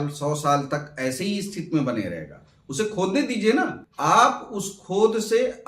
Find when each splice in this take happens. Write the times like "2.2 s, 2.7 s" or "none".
3.9 s